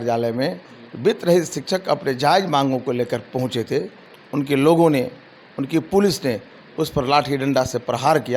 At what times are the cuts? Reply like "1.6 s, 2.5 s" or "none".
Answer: 4.0 s